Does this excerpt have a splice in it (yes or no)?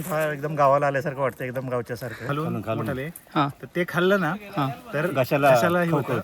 yes